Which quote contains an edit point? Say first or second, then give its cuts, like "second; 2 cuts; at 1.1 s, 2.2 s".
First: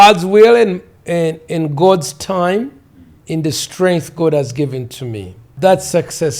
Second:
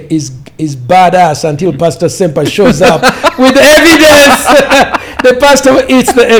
first; 2 cuts; at 3.1 s, 5.5 s